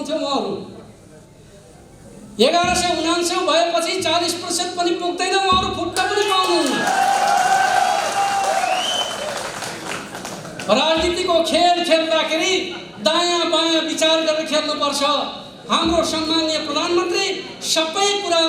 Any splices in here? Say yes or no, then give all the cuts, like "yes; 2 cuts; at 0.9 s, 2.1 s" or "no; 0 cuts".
no; 0 cuts